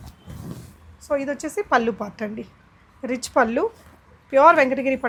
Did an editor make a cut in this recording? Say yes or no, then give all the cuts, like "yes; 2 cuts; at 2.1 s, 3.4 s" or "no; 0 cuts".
no; 0 cuts